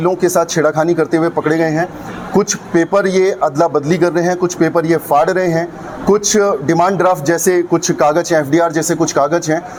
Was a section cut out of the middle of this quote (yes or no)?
no